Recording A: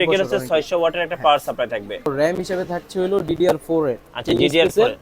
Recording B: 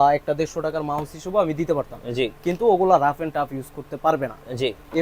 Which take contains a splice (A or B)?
A